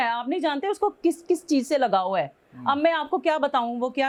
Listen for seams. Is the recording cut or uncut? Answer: uncut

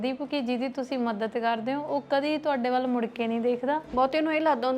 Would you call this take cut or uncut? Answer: cut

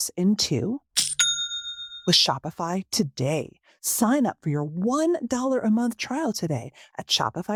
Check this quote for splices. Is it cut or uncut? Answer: uncut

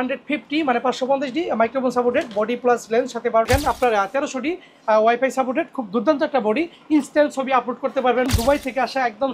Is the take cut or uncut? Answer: cut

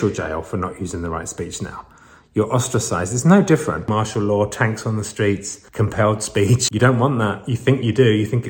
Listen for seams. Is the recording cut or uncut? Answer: cut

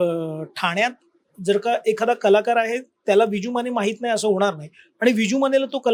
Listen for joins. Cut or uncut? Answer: uncut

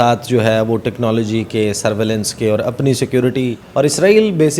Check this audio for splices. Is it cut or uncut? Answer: cut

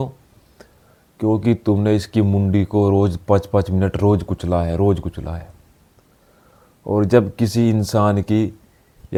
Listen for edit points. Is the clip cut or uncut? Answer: uncut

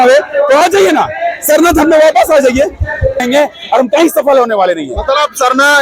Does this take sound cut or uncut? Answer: cut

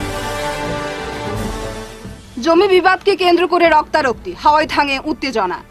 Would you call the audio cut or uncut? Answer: cut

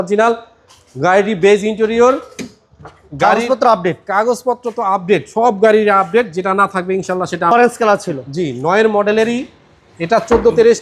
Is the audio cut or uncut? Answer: cut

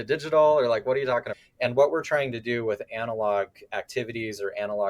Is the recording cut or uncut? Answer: cut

